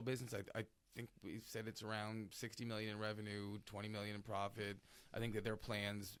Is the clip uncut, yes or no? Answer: yes